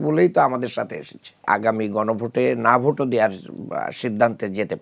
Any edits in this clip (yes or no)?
yes